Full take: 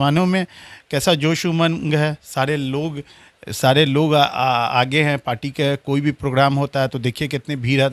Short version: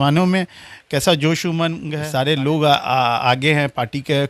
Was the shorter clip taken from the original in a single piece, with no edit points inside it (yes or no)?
no